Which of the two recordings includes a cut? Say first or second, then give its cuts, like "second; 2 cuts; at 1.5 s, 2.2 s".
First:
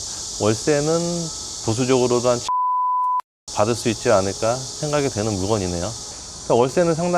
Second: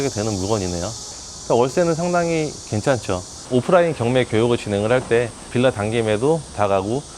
second; 1 cut; at 3.3 s